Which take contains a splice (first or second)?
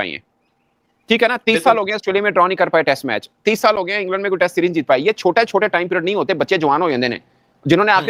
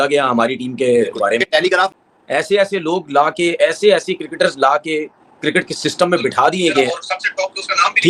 second